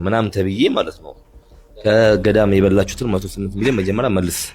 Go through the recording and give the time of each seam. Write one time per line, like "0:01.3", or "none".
none